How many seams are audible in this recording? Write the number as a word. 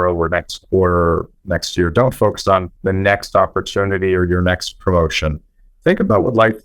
one